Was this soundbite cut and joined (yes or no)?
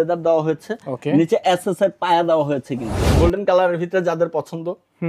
yes